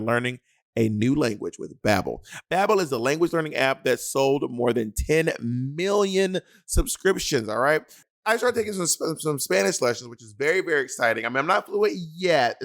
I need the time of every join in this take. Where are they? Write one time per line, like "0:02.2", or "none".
0:08.0